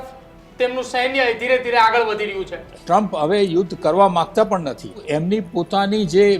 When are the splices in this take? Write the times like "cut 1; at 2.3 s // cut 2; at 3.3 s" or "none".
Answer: cut 1; at 2.7 s // cut 2; at 4.9 s